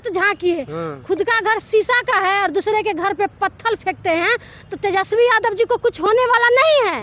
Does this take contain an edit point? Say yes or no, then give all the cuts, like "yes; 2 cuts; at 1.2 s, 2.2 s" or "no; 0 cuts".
no; 0 cuts